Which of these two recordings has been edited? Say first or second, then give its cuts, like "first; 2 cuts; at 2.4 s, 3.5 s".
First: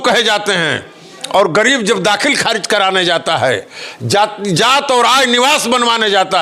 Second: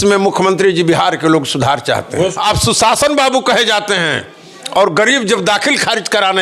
second; 1 cut; at 2.4 s